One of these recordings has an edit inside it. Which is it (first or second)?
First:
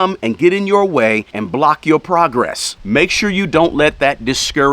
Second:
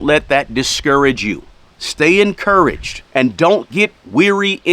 first